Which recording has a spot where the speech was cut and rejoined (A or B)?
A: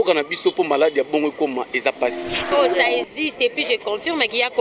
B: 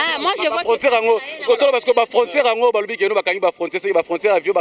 A